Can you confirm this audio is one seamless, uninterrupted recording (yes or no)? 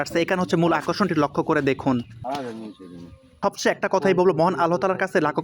no